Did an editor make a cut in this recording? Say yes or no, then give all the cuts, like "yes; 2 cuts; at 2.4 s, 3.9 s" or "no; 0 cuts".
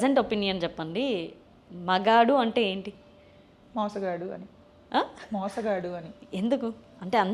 no; 0 cuts